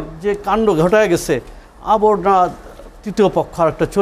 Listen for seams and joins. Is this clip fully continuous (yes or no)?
yes